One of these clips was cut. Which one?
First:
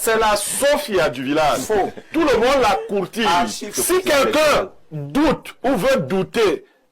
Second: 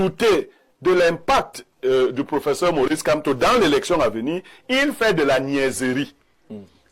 first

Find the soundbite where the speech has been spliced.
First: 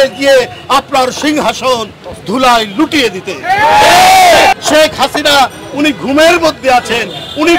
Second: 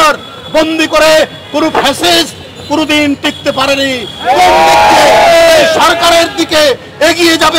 first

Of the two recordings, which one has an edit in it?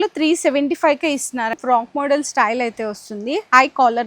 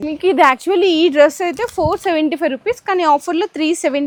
first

